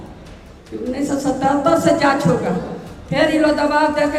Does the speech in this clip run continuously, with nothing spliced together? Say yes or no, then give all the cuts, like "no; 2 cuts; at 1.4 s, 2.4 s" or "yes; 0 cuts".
yes; 0 cuts